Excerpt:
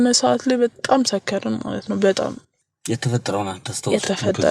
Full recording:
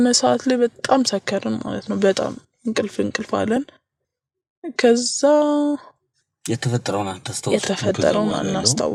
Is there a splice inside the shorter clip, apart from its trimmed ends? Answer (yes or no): yes